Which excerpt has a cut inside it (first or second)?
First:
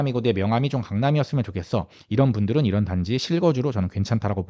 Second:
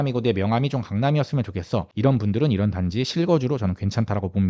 second